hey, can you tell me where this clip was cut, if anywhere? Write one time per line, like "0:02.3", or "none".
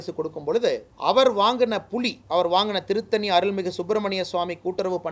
0:00.9
0:02.2